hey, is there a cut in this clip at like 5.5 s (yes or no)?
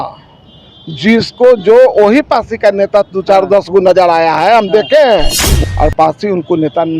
yes